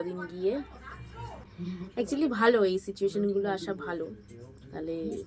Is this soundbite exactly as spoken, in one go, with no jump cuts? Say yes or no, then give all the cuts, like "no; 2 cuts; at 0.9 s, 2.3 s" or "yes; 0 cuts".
no; 1 cut; at 1.4 s